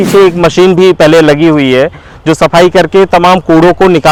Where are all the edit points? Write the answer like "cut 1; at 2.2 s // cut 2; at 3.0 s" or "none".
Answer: none